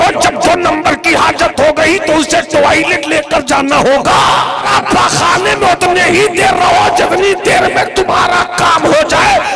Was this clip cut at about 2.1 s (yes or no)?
no